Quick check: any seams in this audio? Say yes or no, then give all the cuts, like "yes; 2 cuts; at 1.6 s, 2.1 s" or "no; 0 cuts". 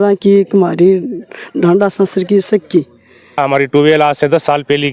yes; 1 cut; at 3.4 s